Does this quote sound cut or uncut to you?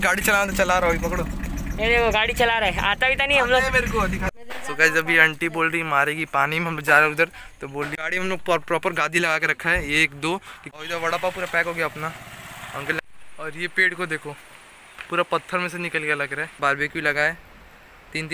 cut